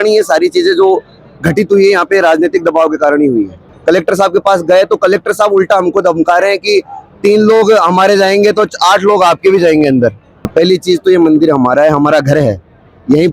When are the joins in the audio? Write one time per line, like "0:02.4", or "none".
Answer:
0:03.6
0:10.5